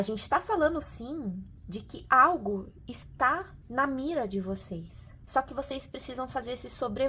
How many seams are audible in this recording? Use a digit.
0